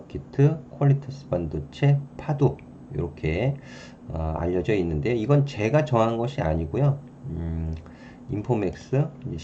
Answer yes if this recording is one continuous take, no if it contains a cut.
yes